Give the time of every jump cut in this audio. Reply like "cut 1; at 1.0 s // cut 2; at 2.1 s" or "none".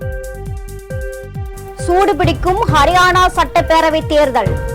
cut 1; at 0.9 s